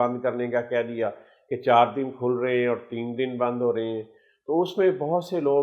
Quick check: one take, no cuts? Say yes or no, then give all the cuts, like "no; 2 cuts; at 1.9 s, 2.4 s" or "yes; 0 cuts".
yes; 0 cuts